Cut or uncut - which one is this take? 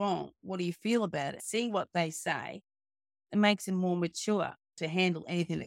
cut